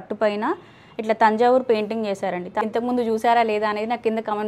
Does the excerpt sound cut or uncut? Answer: cut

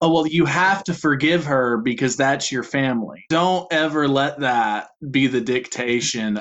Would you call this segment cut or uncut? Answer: cut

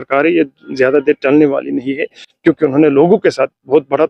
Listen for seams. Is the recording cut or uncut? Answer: uncut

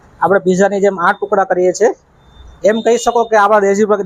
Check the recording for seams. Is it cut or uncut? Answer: uncut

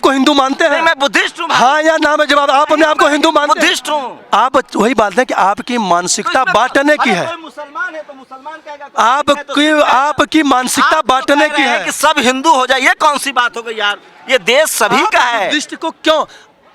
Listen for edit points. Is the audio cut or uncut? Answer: uncut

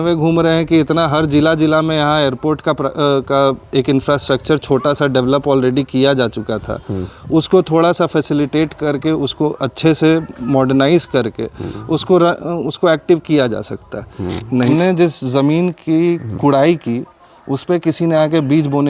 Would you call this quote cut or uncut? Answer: cut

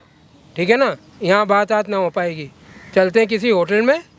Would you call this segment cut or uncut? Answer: uncut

